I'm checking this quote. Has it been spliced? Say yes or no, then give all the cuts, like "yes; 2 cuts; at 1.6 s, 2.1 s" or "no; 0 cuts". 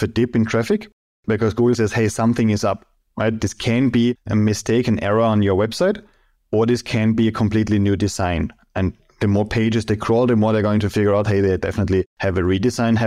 yes; 1 cut; at 4.2 s